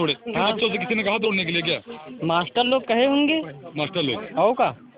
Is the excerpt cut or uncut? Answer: uncut